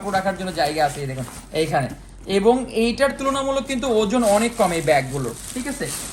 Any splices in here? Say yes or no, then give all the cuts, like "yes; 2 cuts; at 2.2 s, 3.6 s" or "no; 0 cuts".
no; 0 cuts